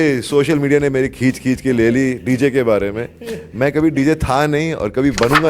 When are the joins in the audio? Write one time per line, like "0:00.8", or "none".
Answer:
none

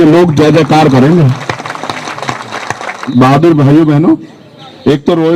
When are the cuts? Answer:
0:02.9

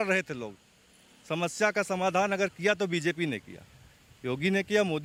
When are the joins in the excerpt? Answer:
none

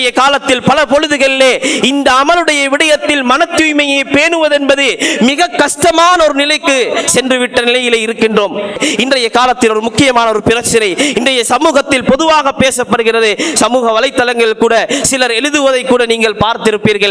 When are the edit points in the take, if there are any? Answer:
0:08.8

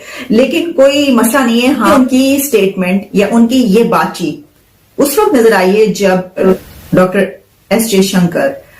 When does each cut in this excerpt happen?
0:01.9
0:06.5

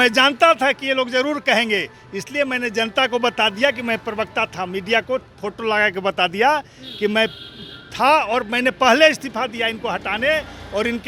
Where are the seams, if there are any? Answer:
none

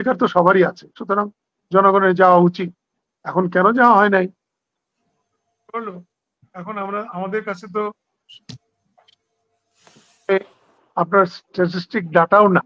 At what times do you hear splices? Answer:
none

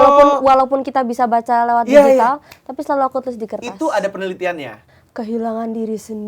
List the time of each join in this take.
0:04.7

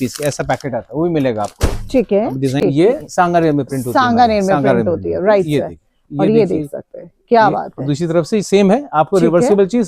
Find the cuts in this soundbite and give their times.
0:02.6

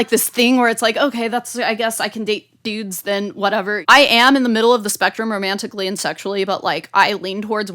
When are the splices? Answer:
0:03.8

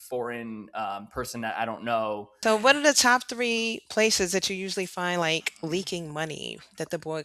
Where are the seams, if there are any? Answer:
0:02.3

